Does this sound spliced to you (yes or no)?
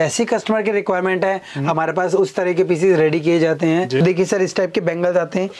yes